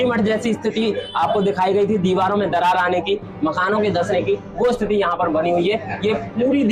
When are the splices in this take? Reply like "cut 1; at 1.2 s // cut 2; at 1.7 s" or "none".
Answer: none